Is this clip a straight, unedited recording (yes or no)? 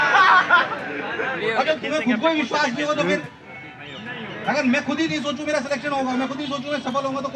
yes